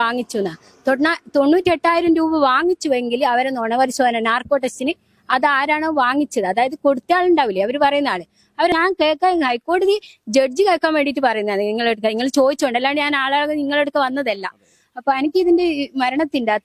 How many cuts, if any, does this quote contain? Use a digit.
1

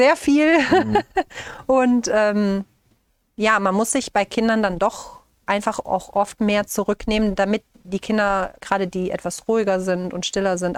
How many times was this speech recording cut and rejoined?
0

